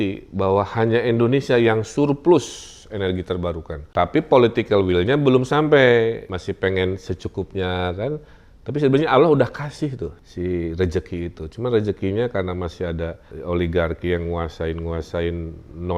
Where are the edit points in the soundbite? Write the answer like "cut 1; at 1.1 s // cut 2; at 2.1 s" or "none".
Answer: cut 1; at 3.9 s // cut 2; at 6.3 s // cut 3; at 10.2 s // cut 4; at 13.3 s